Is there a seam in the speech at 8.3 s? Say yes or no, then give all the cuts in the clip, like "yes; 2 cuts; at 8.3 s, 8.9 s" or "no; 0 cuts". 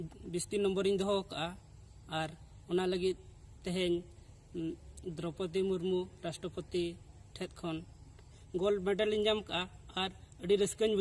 yes; 1 cut; at 8.3 s